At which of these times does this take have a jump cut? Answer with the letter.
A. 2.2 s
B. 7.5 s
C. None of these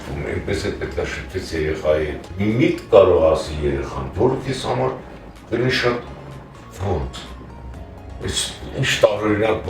A